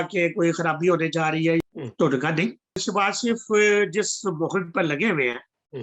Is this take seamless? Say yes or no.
no